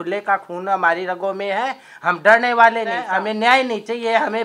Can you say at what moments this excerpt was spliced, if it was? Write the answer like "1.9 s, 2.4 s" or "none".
3.0 s